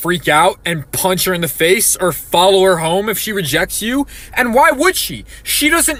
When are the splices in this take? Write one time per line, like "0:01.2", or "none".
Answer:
none